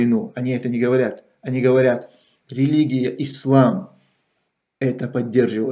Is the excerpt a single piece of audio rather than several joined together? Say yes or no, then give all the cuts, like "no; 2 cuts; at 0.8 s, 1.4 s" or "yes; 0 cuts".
yes; 0 cuts